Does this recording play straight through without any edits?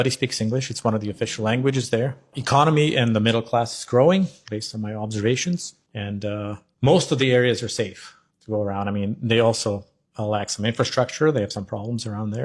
yes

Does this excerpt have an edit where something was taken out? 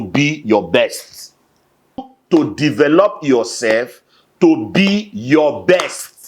yes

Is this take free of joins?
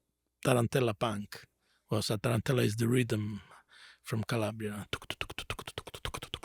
yes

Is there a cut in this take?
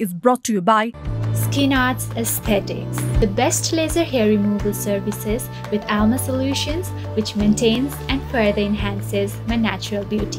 no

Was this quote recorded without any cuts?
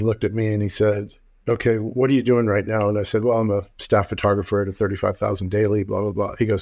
yes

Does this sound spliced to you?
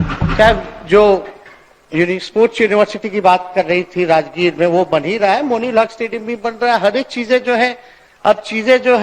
no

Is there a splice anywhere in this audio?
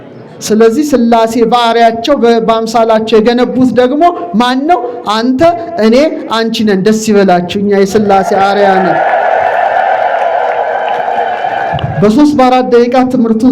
no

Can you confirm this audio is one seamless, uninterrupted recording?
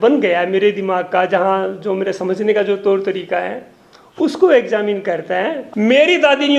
no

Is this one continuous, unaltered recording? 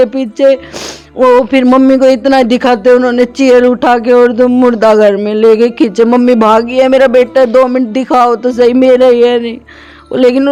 yes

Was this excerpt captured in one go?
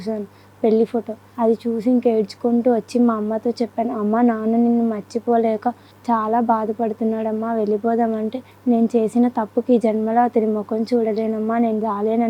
no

